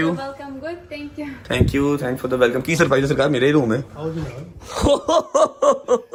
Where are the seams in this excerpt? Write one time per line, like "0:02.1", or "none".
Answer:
none